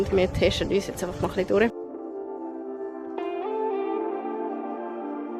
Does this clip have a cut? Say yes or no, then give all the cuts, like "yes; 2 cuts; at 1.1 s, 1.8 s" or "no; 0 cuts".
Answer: no; 0 cuts